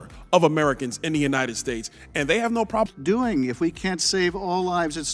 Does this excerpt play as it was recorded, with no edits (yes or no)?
no